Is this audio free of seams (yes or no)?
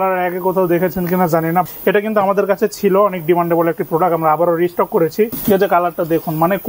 no